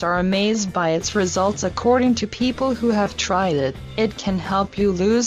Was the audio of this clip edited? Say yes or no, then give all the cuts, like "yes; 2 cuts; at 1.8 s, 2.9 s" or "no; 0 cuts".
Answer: yes; 1 cut; at 2.8 s